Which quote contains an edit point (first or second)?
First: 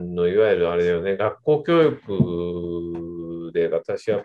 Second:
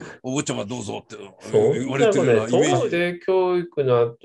second